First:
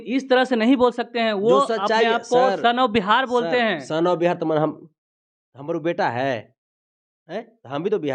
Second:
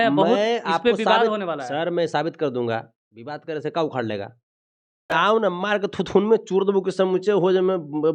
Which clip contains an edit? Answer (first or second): second